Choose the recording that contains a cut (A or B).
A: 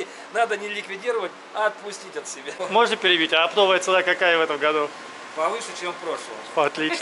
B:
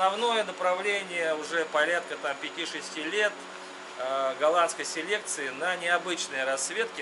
A